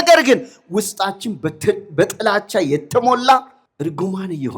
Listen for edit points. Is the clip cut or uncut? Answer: cut